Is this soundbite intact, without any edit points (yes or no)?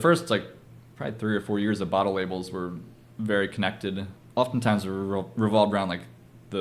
no